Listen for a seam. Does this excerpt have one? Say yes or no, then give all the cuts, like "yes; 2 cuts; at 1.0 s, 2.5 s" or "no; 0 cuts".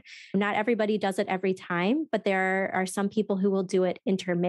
no; 0 cuts